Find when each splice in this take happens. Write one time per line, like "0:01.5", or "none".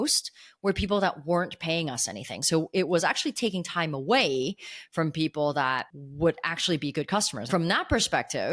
0:07.4